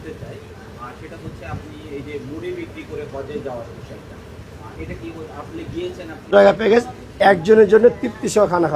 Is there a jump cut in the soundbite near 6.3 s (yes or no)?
yes